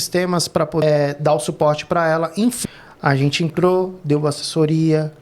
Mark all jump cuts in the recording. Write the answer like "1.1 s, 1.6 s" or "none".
0.8 s, 2.6 s